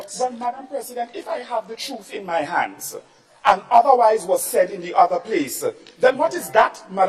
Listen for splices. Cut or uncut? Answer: uncut